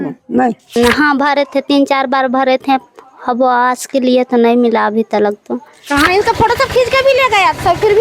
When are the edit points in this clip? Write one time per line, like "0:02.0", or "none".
0:00.7
0:06.1